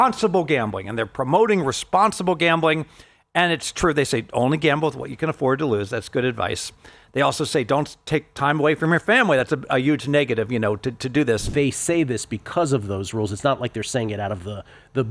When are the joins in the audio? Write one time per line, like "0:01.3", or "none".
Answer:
0:11.5